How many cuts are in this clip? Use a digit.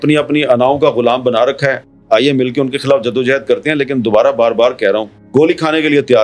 0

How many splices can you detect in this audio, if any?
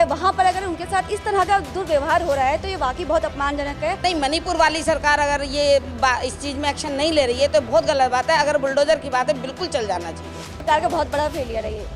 2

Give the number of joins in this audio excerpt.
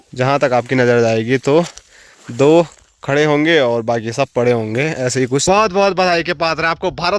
1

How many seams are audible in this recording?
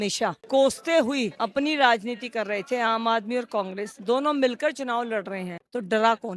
0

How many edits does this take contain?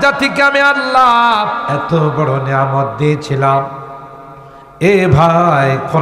1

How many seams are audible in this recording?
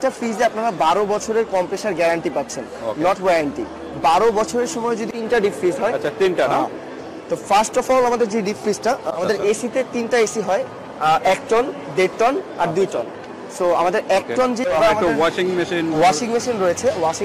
3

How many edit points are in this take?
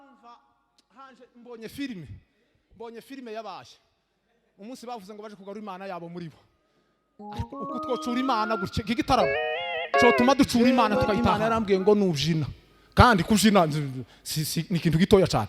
1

